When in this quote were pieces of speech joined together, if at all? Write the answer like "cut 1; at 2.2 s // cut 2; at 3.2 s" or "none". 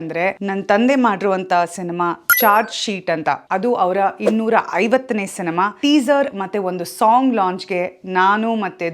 cut 1; at 5.7 s